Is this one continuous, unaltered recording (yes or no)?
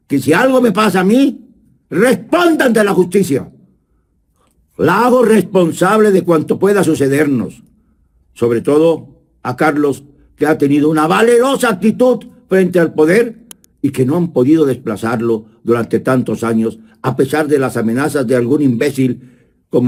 yes